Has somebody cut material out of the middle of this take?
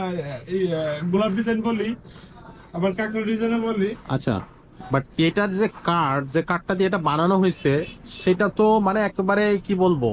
no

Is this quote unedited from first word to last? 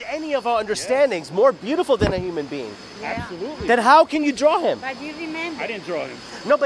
yes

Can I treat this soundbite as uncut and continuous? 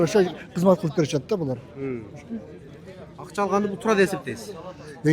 yes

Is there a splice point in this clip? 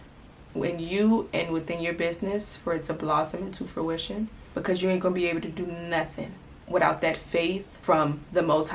yes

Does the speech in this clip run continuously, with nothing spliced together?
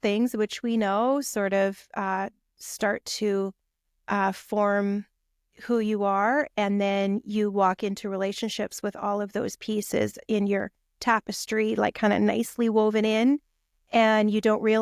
yes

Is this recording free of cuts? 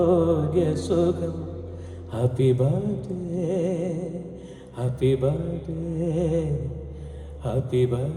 yes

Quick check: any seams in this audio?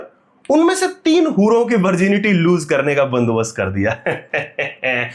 no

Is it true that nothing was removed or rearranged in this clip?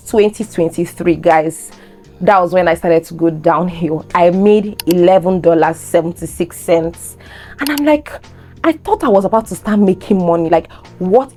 yes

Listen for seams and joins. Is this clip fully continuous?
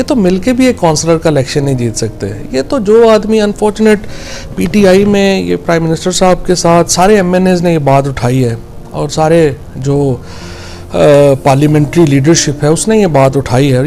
yes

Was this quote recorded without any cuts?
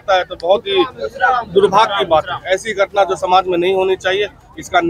yes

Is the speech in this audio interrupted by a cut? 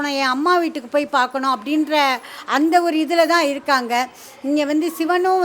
no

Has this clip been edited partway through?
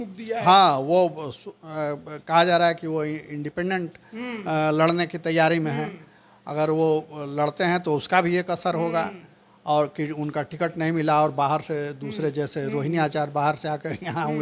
no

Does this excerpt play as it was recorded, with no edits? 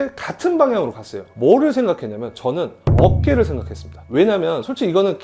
no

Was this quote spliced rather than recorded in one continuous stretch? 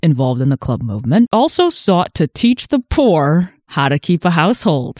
yes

